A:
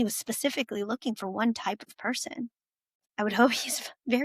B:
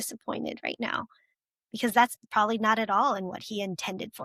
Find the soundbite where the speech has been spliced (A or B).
A